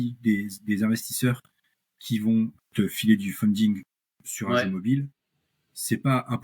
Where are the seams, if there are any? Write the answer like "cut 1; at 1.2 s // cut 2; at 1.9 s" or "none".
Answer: cut 1; at 2.6 s